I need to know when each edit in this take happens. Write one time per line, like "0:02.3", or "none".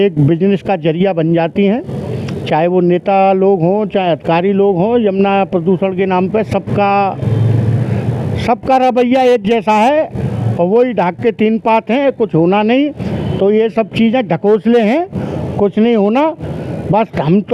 0:13.1